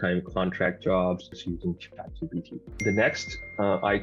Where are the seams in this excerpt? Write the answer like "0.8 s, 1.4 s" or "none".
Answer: 1.4 s, 2.6 s

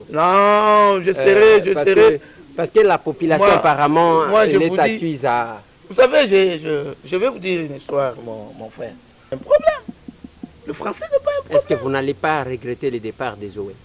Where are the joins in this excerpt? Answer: 9.4 s

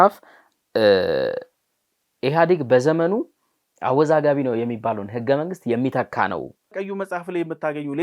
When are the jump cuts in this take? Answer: 6.7 s

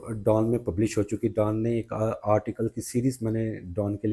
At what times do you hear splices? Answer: none

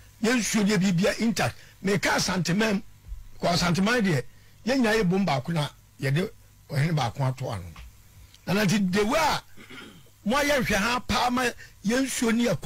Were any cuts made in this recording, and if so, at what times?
none

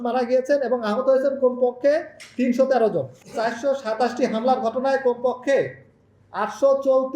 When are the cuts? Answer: 3.1 s

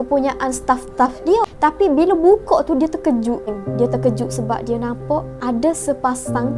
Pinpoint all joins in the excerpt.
1.5 s, 3.6 s, 5.3 s

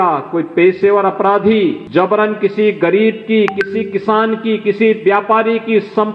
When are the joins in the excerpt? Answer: 1.8 s

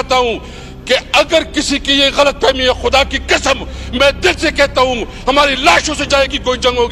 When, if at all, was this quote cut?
none

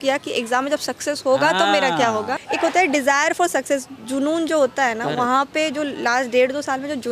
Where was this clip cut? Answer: 2.3 s

